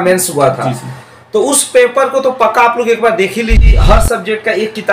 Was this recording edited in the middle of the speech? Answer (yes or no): yes